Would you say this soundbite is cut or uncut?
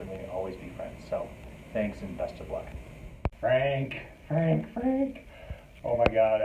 uncut